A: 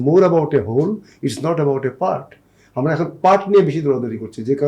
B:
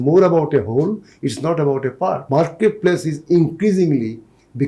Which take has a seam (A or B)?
B